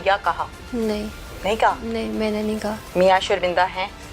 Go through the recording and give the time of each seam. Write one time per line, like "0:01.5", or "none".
0:02.8